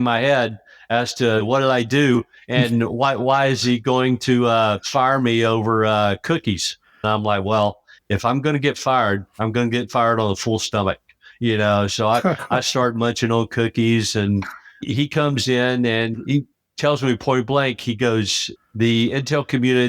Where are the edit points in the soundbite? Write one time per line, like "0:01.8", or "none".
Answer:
0:01.4
0:04.8
0:07.0
0:14.9

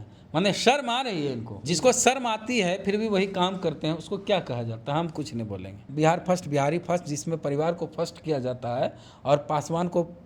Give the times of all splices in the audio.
0:01.5
0:05.8

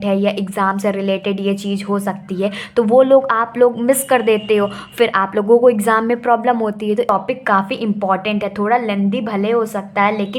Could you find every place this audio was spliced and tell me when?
0:07.1

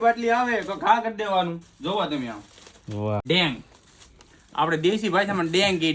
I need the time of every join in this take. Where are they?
0:03.2

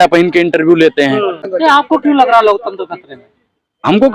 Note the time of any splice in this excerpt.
none

